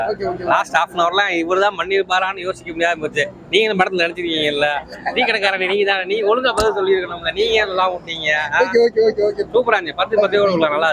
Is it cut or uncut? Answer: uncut